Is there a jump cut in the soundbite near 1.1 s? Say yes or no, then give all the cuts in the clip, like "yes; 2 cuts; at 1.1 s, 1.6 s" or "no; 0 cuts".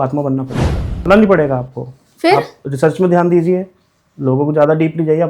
yes; 1 cut; at 1.1 s